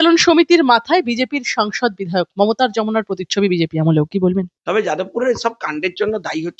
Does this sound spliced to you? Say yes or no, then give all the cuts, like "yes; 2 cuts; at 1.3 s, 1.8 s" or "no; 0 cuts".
yes; 1 cut; at 4.5 s